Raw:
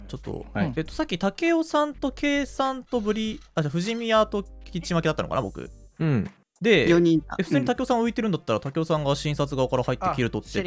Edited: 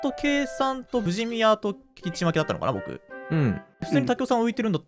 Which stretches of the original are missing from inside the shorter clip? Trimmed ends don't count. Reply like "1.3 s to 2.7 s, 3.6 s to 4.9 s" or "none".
3.0 s to 3.7 s, 6.5 s to 7.4 s